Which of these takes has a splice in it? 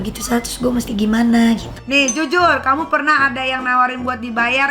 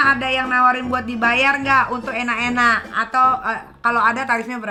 first; 1 cut; at 1.7 s

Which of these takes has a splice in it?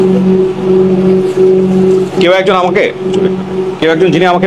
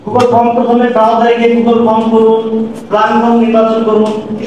first; 1 cut; at 2.1 s

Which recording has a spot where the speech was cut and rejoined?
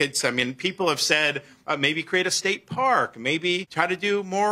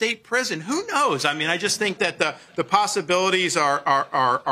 first; 2 cuts; at 1.5 s, 3.7 s

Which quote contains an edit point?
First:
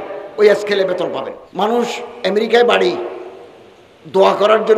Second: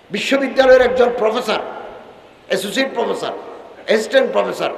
first; 1 cut; at 1.4 s

